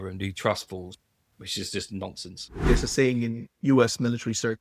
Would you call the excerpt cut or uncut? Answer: cut